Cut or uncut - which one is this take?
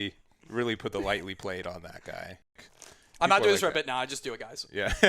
cut